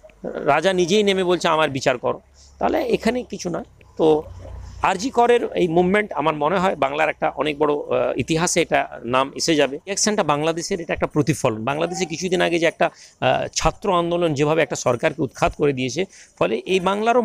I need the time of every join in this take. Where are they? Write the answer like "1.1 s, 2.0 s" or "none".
10.0 s